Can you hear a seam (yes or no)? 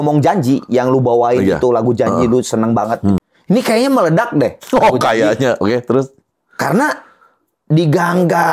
yes